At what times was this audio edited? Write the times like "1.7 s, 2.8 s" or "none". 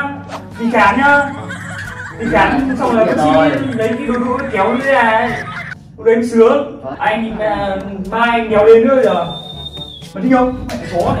6.9 s